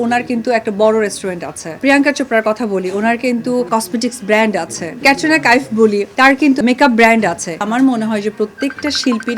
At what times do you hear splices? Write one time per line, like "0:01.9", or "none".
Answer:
0:01.8
0:03.7
0:05.0
0:06.4
0:07.6